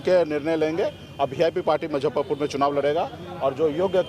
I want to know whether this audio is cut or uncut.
uncut